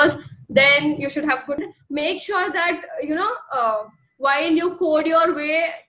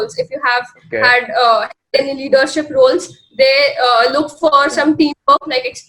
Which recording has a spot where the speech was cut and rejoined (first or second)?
first